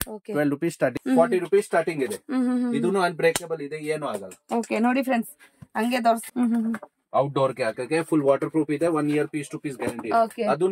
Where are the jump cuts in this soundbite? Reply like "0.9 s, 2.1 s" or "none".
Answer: 1.0 s, 6.1 s